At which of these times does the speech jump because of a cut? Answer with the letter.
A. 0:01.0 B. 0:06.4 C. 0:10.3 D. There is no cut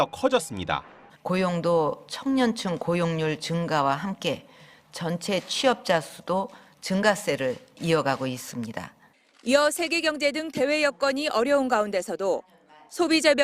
A